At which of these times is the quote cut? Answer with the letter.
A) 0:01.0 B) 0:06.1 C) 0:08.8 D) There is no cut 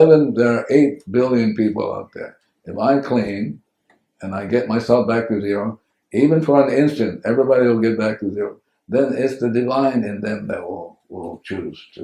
D